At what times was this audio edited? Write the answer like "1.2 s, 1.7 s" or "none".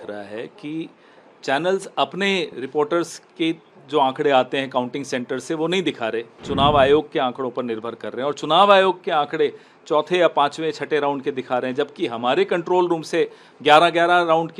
none